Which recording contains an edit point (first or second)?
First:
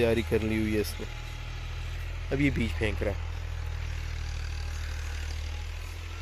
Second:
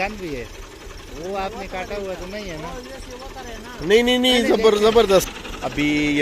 second